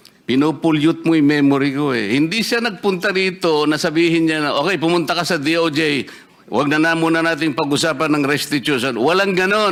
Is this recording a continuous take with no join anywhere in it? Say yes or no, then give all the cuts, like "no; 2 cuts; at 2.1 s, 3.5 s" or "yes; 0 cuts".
yes; 0 cuts